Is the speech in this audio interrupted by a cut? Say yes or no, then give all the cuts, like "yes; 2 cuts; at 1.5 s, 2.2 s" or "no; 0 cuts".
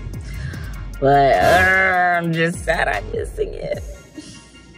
no; 0 cuts